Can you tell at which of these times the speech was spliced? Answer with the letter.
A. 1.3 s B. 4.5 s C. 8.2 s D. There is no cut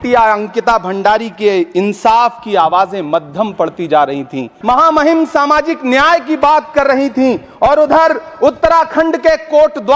B